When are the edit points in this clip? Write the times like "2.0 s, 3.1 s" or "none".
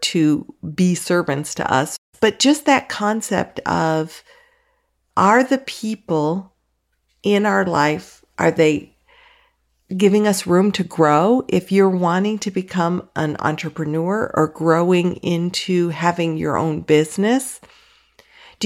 2.0 s